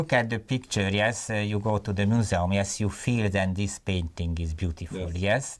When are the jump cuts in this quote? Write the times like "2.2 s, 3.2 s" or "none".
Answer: none